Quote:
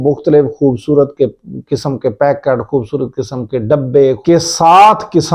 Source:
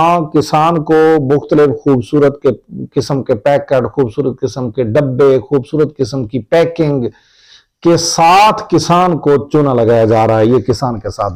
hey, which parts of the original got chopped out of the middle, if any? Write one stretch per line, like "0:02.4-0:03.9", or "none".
0:05.4-0:07.8